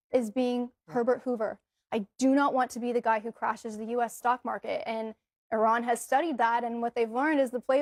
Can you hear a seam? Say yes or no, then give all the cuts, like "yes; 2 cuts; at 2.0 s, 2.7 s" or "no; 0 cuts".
no; 0 cuts